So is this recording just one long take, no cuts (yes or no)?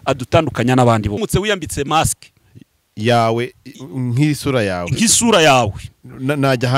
no